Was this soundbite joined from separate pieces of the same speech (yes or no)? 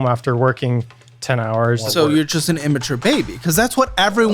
yes